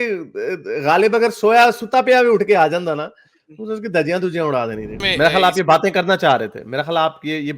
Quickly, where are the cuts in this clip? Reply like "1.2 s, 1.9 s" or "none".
5.0 s